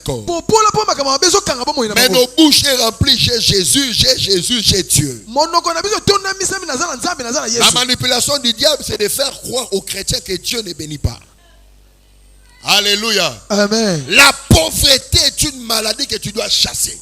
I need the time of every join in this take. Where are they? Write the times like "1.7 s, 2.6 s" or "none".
11.3 s